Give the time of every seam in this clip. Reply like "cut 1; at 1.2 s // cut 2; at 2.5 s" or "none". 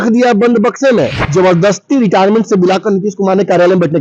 cut 1; at 1.2 s